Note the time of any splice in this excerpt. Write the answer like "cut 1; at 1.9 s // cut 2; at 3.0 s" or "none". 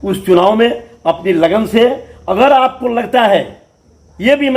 none